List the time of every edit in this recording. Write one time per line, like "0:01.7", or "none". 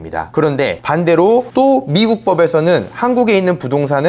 none